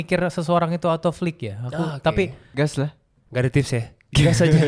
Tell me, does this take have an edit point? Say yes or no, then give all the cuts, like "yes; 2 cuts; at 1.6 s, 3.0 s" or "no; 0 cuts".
yes; 1 cut; at 2.8 s